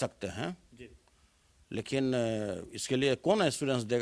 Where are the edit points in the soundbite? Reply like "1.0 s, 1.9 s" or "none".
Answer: none